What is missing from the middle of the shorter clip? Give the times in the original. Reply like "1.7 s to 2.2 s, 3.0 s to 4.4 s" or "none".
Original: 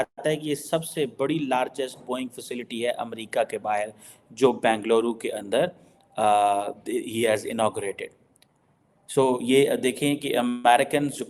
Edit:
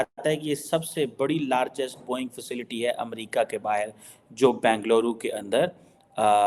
none